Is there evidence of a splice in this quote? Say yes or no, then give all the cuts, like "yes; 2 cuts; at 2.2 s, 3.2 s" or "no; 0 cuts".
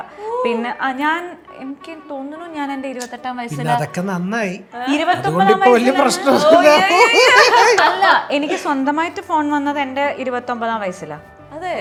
no; 0 cuts